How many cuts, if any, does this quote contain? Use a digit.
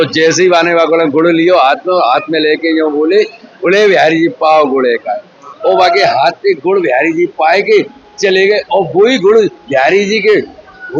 1